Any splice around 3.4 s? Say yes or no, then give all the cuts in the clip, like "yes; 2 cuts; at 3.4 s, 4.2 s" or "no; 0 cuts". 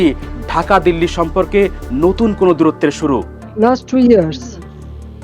yes; 1 cut; at 3.4 s